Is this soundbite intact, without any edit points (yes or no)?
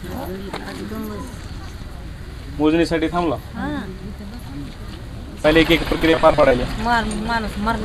no